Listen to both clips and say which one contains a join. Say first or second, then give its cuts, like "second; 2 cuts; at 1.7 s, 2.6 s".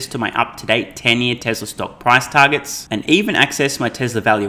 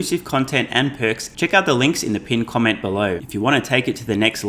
second; 2 cuts; at 1.3 s, 3.2 s